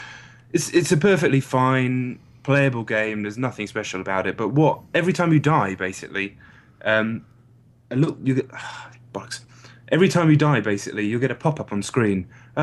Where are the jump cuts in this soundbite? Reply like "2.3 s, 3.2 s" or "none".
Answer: none